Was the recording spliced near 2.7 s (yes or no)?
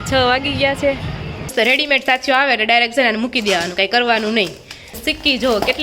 no